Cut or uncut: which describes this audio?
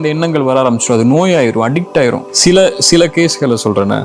cut